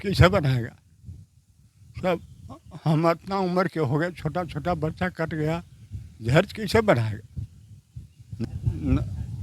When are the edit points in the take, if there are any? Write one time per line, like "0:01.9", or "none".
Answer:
0:08.4